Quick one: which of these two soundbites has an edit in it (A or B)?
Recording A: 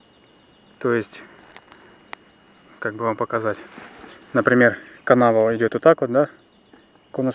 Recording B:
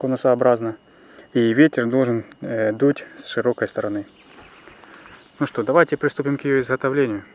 A